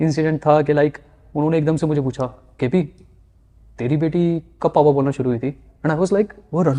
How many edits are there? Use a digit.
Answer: 0